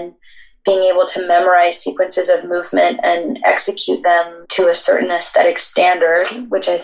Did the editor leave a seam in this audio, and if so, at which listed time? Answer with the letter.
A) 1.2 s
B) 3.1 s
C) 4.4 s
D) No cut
C